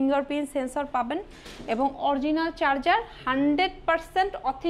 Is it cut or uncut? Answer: uncut